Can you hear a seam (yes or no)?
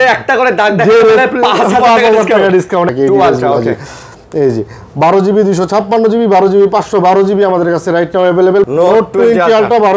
yes